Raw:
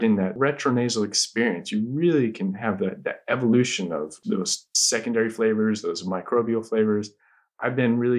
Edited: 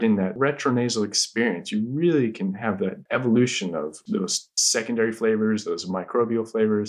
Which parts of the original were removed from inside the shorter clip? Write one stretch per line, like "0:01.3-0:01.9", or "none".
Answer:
0:03.0-0:03.2